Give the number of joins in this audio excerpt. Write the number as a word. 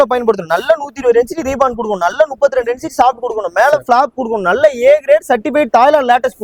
zero